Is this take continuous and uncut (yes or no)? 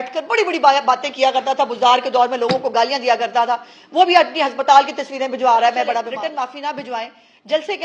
no